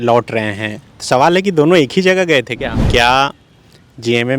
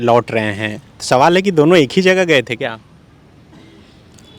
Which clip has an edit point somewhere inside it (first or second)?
first